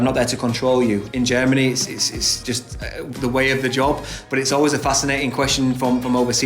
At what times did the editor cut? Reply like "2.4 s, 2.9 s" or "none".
1.1 s, 2.4 s